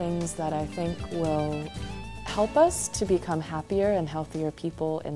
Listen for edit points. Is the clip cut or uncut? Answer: uncut